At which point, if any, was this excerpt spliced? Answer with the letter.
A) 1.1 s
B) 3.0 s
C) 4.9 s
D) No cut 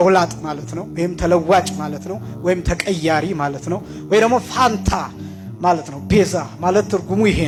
D